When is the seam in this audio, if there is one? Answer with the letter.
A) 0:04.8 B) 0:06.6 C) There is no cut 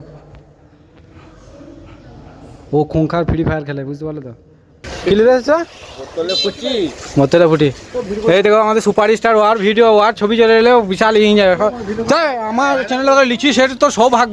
A